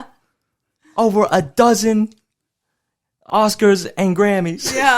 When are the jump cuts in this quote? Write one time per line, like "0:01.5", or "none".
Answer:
0:03.3